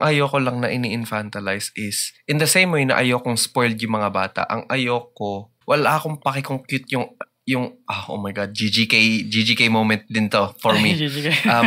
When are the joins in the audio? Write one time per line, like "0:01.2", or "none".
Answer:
0:05.5

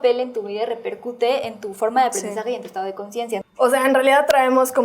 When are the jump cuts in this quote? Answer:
0:03.4

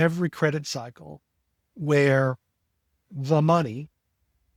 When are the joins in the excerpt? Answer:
none

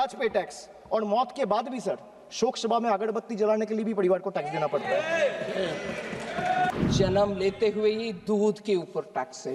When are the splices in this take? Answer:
0:06.7

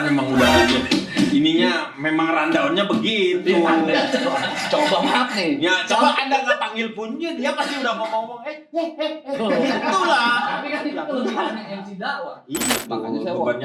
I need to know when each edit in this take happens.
0:12.7

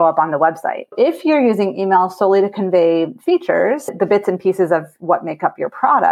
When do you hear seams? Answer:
0:00.9
0:03.9

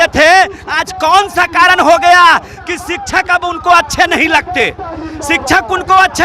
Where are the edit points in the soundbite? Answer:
none

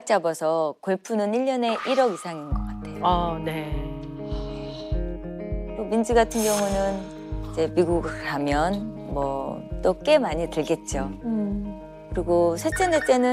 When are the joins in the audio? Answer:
none

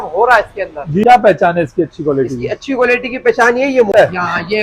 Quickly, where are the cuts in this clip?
0:01.0
0:03.9

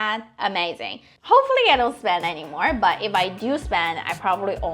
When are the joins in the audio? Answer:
0:01.1

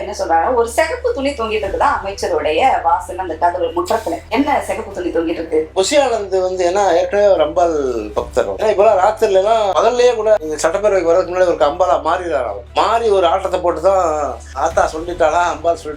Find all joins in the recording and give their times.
0:04.3
0:05.7
0:08.5

